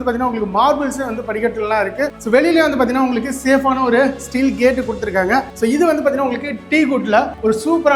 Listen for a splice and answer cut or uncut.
cut